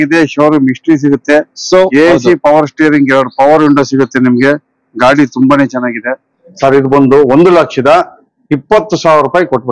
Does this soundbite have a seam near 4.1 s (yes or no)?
no